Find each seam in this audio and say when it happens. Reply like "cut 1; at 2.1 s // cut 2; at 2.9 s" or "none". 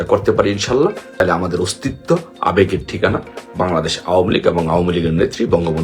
cut 1; at 1.2 s